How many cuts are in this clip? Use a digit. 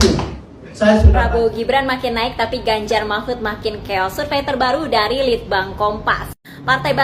1